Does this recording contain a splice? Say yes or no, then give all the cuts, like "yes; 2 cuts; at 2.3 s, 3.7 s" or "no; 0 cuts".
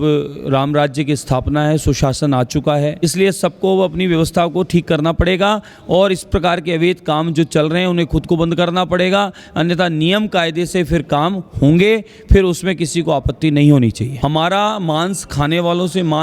yes; 2 cuts; at 2.9 s, 14.1 s